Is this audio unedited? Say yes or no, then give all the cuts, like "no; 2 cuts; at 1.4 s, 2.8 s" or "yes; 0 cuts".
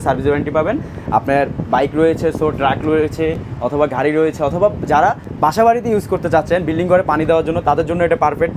yes; 0 cuts